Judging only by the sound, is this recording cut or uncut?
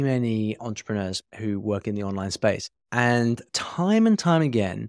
cut